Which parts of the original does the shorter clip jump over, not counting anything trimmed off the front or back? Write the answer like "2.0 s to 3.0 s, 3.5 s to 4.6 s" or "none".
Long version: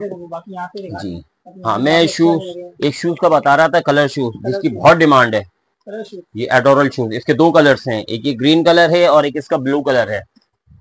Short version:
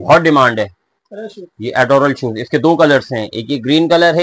none